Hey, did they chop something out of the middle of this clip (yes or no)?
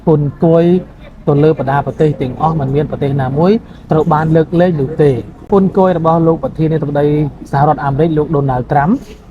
yes